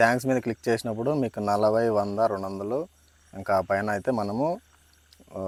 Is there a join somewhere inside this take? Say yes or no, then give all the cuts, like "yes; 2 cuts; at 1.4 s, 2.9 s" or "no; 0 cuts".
no; 0 cuts